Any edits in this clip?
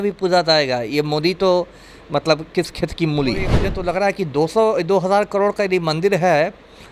yes; 1 cut; at 3.6 s

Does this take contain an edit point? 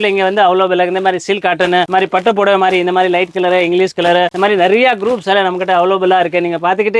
no; 0 cuts

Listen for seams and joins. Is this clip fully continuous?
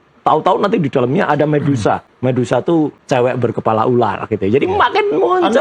no; 2 cuts; at 2.1 s, 3.0 s

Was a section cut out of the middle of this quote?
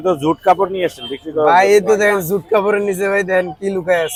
no; 0 cuts

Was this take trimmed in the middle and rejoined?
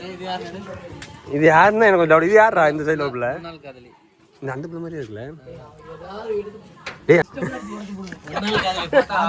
no; 0 cuts

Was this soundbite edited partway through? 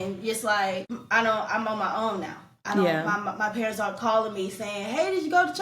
yes; 1 cut; at 0.9 s

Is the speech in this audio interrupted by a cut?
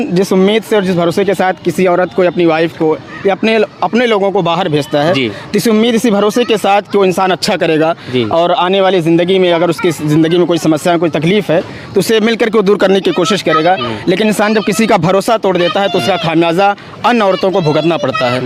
no; 0 cuts

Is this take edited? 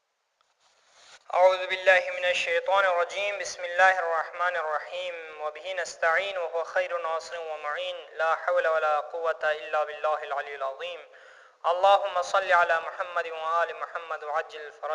yes; 1 cut; at 10.5 s

